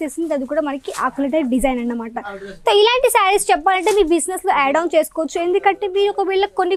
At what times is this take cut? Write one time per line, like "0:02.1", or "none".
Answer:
none

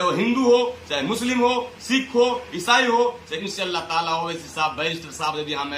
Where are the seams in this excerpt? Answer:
0:03.4

